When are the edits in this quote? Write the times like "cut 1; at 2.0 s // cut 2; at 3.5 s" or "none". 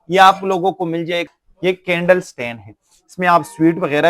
cut 1; at 1.2 s